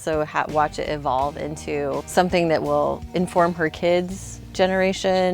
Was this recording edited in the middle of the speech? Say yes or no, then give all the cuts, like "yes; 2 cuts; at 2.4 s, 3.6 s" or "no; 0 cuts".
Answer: yes; 2 cuts; at 2.1 s, 3.0 s